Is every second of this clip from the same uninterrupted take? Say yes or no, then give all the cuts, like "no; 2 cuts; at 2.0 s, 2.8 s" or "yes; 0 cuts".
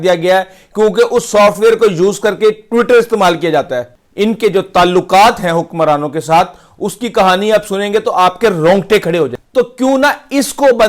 no; 2 cuts; at 4.0 s, 9.4 s